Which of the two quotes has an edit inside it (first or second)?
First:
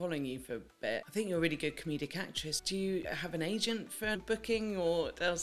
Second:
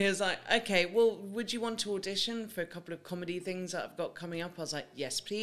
first